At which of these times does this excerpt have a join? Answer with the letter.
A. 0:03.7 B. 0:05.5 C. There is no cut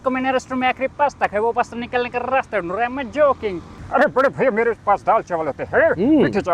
A